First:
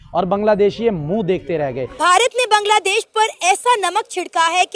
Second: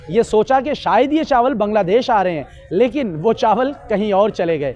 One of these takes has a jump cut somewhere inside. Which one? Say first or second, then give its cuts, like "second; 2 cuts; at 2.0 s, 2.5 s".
first; 1 cut; at 2.0 s